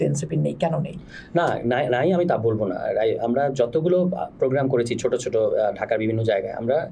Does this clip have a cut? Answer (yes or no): no